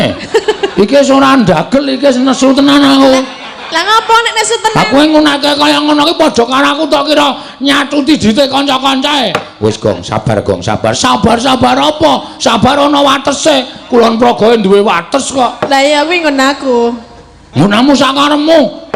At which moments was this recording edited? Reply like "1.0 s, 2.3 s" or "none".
none

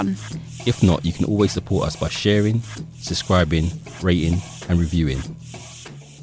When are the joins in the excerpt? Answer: 5.2 s

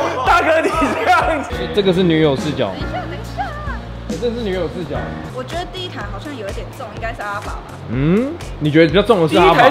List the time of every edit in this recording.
1.4 s, 5.2 s

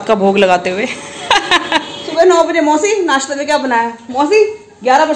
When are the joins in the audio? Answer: 2.0 s

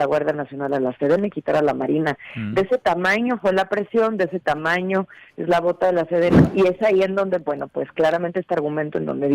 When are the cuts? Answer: 6.5 s

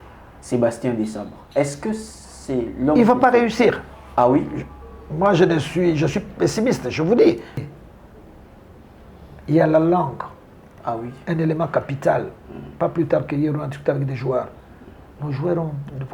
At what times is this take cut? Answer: 7.6 s

